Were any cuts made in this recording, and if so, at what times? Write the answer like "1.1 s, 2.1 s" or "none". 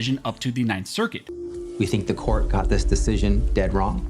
1.3 s